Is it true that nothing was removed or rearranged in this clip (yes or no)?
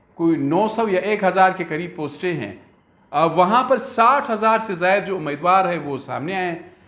yes